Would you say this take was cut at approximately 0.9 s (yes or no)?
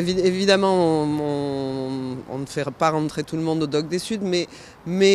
yes